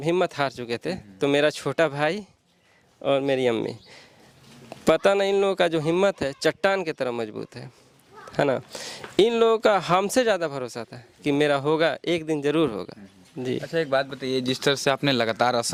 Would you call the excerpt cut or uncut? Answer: uncut